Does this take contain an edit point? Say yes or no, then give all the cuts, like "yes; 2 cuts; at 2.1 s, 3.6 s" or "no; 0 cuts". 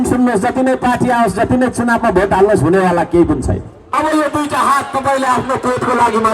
yes; 1 cut; at 3.8 s